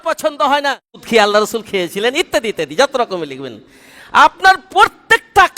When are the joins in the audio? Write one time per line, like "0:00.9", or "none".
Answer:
0:01.0